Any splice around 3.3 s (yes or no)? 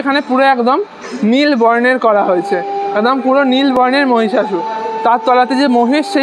no